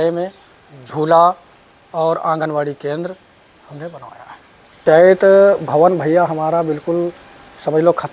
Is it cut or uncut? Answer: cut